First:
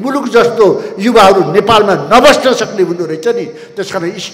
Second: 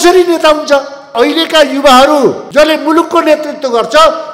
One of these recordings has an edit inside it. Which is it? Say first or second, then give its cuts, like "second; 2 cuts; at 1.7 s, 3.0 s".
second; 2 cuts; at 1.1 s, 2.4 s